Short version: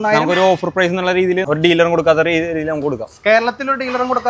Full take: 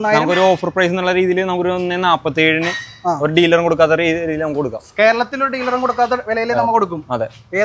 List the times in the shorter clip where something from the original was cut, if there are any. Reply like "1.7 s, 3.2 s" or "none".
1.5 s